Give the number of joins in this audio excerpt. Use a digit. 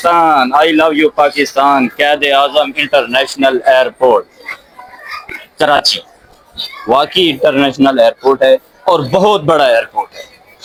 0